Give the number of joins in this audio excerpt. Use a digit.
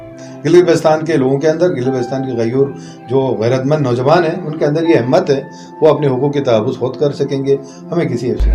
0